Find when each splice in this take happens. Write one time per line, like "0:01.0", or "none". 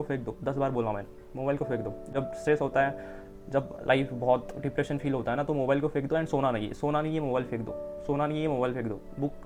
none